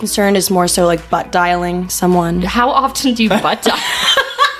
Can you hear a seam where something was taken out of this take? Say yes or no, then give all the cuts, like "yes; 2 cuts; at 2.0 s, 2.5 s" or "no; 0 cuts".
yes; 1 cut; at 2.5 s